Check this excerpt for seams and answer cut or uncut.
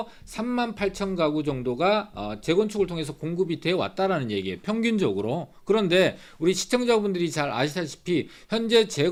uncut